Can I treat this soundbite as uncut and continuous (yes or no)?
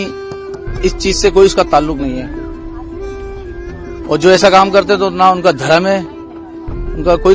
no